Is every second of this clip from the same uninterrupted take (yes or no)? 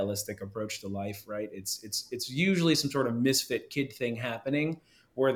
yes